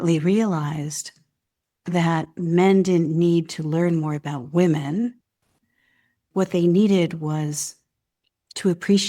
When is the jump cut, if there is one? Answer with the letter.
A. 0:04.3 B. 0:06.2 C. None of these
B